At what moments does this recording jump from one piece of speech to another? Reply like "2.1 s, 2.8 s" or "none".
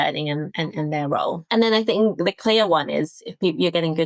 1.4 s